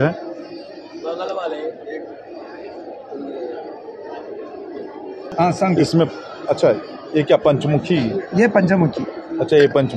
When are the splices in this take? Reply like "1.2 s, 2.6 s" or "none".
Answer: 5.3 s